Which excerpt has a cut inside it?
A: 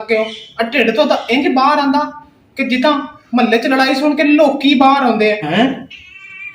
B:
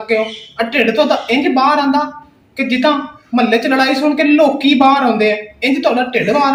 A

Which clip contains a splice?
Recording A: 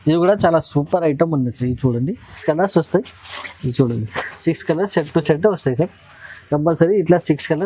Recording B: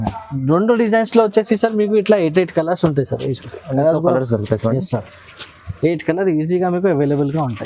A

